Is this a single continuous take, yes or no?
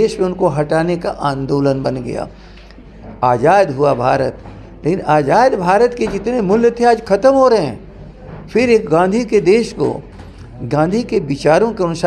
yes